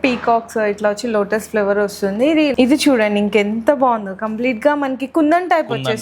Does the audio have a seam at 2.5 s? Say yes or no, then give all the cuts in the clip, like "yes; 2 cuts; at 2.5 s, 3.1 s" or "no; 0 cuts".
yes; 1 cut; at 2.5 s